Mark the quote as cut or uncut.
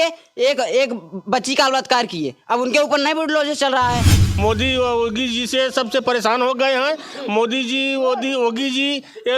cut